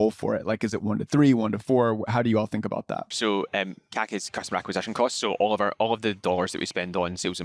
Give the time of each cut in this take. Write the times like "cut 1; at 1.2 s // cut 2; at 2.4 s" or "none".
cut 1; at 3.1 s // cut 2; at 6.2 s